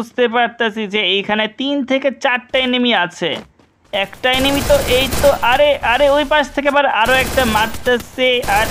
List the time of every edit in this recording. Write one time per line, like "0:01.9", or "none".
none